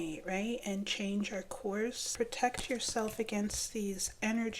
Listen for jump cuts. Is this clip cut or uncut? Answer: cut